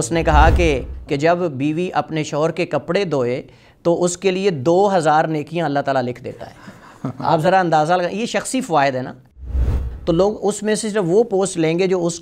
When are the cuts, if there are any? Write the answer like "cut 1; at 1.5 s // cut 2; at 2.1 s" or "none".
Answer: cut 1; at 0.9 s // cut 2; at 9.5 s